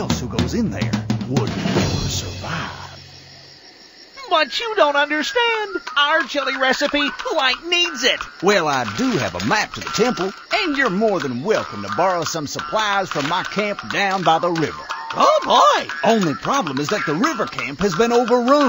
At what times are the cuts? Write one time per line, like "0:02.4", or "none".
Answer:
none